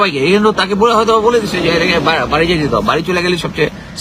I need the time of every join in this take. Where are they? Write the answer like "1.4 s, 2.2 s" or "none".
none